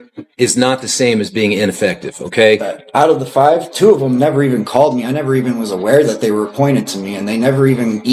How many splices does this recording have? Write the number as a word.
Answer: one